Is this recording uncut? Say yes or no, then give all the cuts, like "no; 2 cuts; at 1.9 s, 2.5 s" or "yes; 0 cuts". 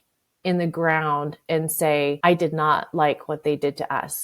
no; 1 cut; at 2.2 s